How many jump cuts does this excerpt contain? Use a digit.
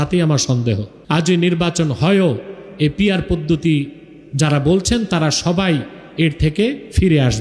1